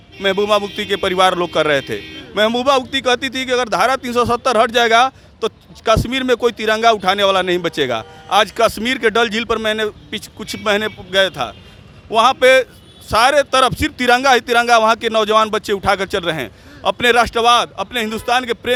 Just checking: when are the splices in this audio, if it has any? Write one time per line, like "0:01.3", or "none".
none